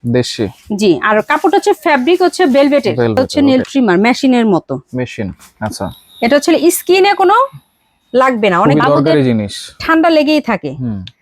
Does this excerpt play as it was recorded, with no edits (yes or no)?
no